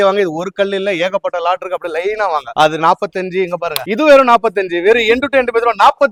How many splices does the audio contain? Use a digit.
0